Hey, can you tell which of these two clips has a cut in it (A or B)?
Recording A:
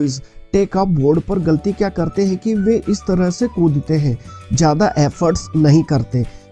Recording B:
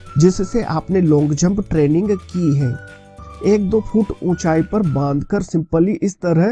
B